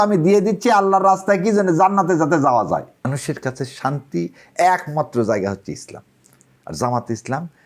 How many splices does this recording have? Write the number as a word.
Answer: one